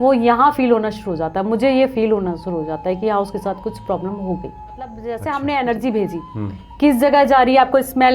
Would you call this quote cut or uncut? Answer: cut